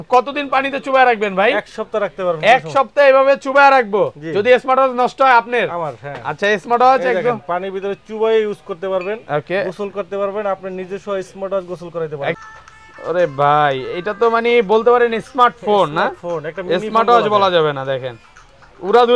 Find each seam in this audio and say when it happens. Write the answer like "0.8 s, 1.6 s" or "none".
12.4 s